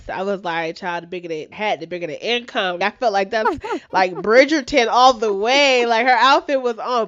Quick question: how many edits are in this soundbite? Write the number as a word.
one